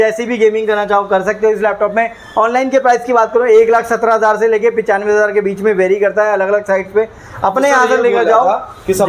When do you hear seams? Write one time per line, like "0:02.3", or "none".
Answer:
none